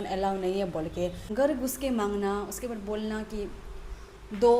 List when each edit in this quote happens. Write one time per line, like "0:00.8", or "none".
0:01.2